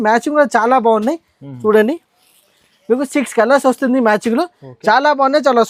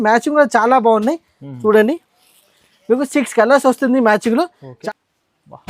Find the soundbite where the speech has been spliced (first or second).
second